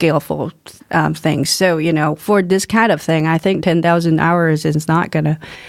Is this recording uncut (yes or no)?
yes